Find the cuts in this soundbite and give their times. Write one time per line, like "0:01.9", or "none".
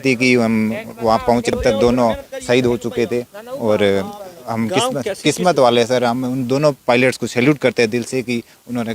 0:01.5